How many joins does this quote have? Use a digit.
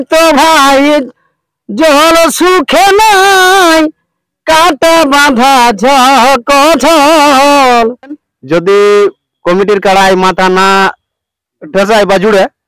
1